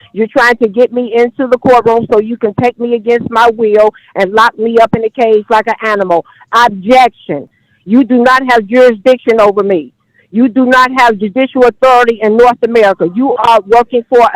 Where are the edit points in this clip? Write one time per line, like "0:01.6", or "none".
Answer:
none